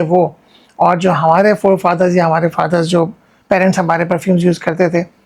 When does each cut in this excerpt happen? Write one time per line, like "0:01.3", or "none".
none